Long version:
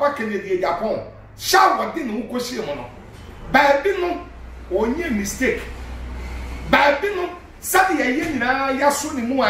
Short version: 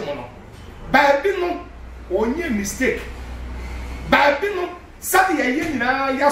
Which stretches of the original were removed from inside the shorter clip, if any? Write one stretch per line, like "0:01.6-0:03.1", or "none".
none

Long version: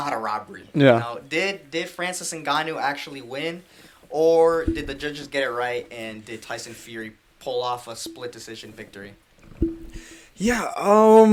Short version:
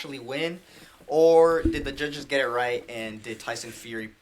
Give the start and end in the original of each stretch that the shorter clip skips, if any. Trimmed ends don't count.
none

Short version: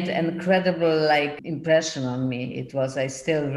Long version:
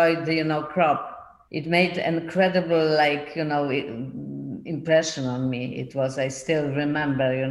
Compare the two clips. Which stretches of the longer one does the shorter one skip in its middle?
0:03.3-0:04.6

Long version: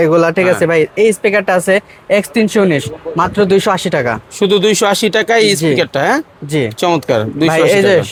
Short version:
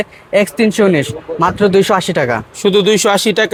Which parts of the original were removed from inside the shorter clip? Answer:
none

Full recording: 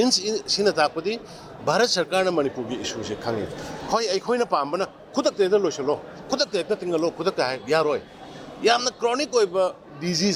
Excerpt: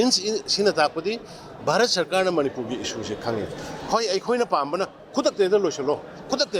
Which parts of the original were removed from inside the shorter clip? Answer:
none

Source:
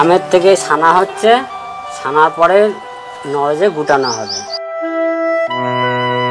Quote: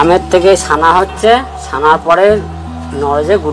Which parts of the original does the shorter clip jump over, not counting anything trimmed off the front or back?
0:01.6-0:01.9

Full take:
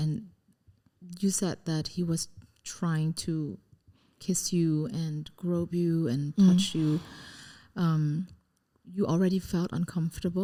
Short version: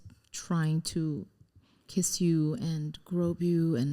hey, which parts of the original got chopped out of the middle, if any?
none

